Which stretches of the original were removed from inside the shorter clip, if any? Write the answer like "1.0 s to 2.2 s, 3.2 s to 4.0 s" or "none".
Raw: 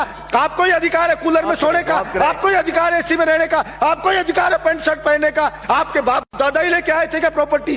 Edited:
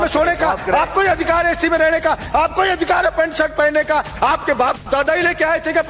none